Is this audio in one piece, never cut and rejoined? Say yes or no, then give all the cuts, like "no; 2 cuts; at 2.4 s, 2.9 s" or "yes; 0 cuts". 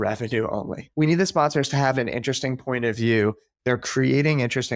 no; 1 cut; at 3.5 s